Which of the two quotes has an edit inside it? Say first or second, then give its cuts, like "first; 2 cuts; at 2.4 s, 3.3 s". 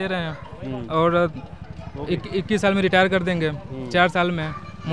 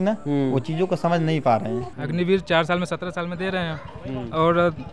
second; 1 cut; at 1.8 s